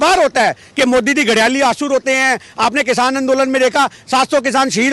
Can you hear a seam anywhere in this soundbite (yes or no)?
no